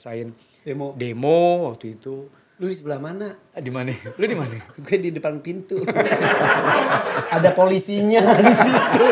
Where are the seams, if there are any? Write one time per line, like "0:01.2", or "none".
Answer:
none